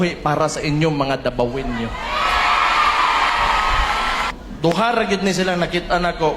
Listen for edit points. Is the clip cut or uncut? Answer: cut